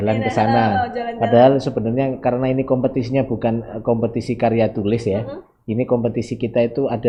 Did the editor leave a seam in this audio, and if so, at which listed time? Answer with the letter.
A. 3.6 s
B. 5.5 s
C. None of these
C